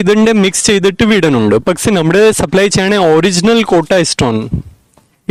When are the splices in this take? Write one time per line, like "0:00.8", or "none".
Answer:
none